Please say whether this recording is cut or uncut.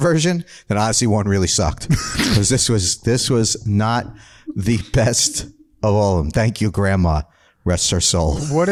uncut